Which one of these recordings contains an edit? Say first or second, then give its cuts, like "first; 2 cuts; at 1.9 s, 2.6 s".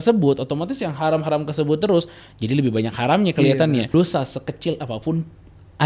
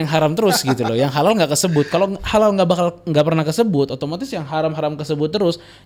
first; 1 cut; at 3.9 s